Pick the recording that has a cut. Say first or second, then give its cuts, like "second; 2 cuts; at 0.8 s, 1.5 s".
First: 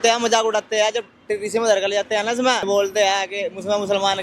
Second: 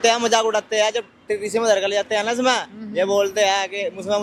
first; 1 cut; at 2.7 s